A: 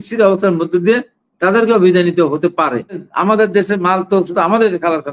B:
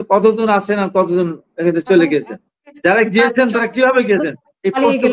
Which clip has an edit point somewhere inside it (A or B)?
A